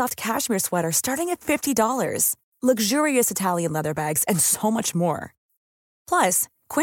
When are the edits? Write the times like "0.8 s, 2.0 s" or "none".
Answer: none